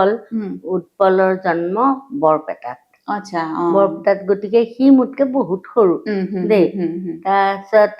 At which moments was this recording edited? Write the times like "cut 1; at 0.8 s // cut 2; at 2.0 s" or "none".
none